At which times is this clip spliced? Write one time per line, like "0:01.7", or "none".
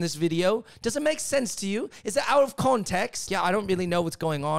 0:03.3